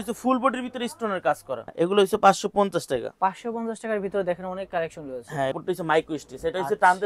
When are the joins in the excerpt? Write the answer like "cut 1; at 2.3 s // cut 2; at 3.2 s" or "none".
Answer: cut 1; at 1.7 s // cut 2; at 5.6 s

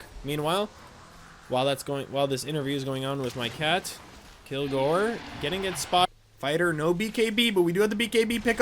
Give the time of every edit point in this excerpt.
cut 1; at 6.0 s

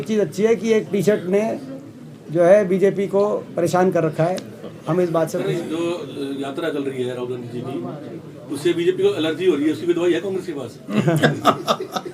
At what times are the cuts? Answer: none

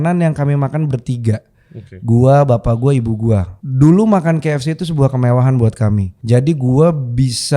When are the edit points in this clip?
cut 1; at 3.6 s // cut 2; at 6.1 s

